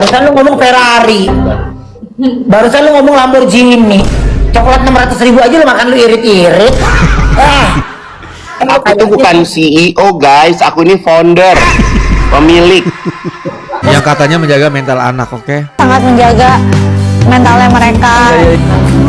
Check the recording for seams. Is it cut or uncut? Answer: cut